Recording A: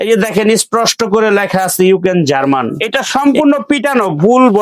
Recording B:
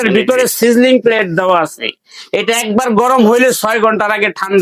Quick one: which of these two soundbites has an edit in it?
A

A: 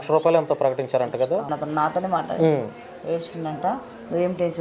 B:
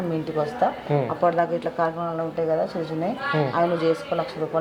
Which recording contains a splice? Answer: A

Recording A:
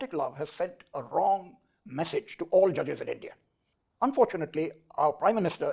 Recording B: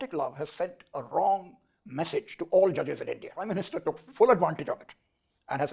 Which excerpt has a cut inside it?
B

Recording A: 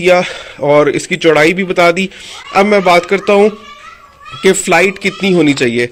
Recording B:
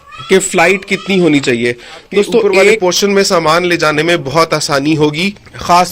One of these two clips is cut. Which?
B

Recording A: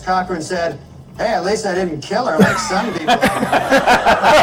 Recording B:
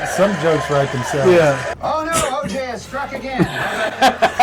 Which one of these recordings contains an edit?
B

